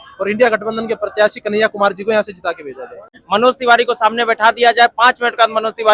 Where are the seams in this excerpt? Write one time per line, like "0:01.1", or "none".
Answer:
0:03.1

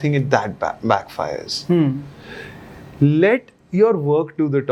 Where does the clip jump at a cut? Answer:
none

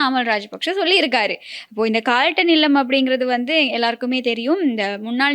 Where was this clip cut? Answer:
none

